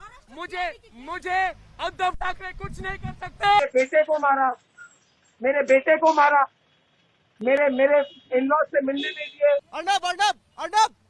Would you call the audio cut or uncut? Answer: cut